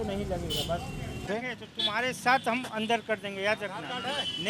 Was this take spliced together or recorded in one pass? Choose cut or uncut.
cut